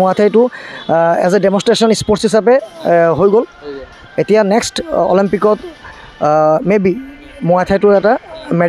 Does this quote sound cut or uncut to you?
uncut